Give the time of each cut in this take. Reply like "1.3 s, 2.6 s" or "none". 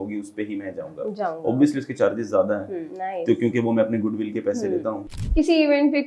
5.1 s